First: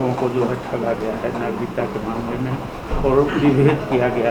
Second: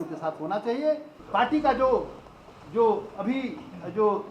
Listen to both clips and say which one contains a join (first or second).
second